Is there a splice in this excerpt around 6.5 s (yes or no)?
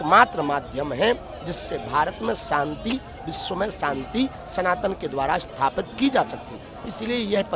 no